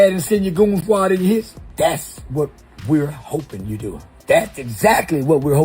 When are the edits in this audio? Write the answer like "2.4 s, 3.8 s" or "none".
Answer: 1.6 s, 4.1 s